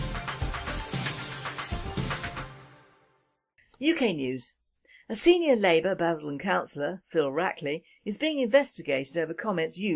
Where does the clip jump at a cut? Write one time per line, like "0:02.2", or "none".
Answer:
0:04.3